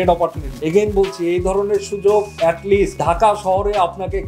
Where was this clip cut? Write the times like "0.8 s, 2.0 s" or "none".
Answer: none